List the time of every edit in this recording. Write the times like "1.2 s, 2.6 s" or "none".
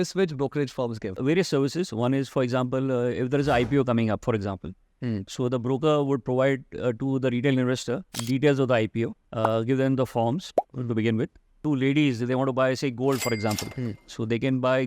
1.2 s, 9.2 s, 11.6 s